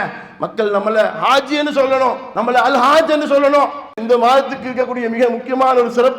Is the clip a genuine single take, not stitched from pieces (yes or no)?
no